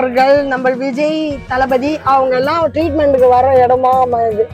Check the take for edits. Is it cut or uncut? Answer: uncut